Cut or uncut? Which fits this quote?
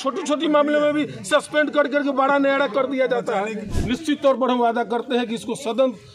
cut